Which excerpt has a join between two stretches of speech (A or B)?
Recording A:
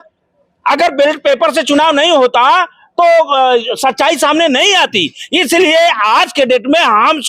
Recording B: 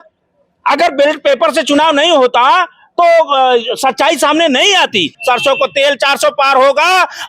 B